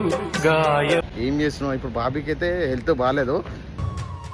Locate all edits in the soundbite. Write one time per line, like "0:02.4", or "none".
0:01.1

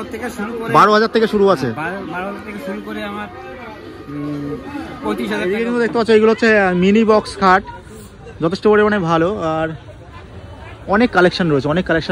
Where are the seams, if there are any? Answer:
0:05.6

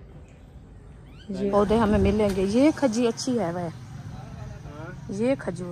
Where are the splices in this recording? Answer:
0:01.5

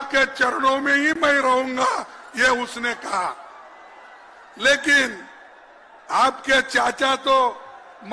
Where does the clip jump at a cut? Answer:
none

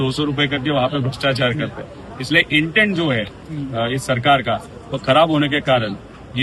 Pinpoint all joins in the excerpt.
none

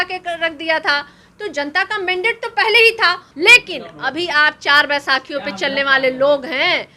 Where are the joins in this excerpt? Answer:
0:03.3

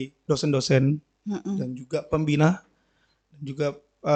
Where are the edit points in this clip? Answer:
none

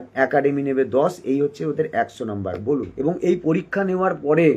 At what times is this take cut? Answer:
0:02.9

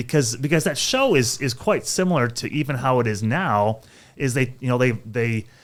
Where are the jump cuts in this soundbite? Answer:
none

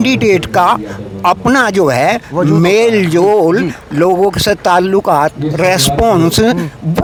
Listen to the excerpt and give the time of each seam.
none

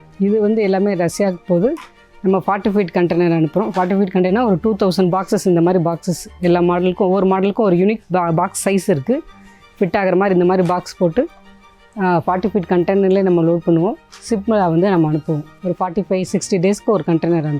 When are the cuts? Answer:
none

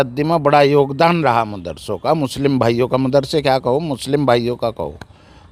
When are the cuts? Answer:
none

